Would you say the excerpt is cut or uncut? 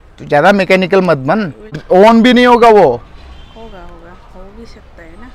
cut